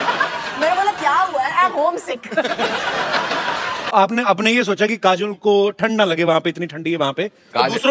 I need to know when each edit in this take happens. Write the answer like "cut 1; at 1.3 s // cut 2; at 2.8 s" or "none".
cut 1; at 3.9 s